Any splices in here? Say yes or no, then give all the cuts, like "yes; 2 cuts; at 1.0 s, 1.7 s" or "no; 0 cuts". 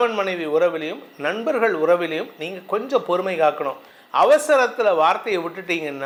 no; 0 cuts